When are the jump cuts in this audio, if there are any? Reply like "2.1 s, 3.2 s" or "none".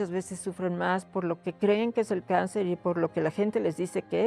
none